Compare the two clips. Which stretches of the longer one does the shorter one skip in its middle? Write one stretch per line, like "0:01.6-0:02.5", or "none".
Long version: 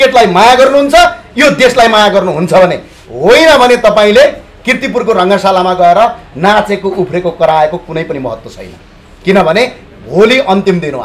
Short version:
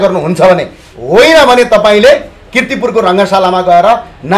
none

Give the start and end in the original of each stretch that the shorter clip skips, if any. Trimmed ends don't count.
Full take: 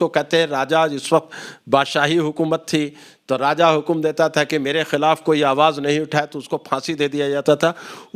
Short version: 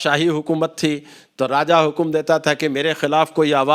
none

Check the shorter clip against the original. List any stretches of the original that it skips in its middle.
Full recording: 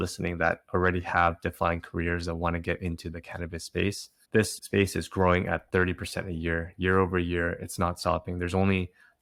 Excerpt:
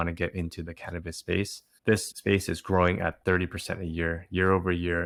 none

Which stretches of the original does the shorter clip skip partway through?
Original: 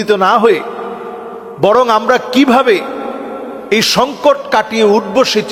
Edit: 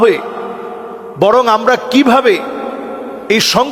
none

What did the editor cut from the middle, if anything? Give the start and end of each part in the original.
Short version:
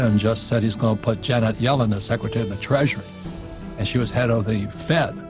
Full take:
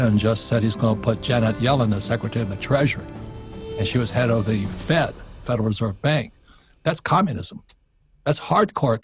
none

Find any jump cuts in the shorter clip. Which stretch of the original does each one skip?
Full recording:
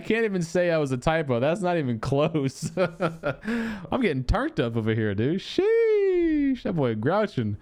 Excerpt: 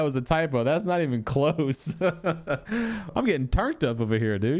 none

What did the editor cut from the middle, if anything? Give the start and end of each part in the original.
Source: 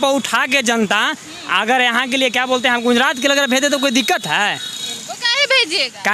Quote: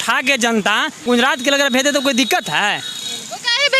0:01.3-0:02.8

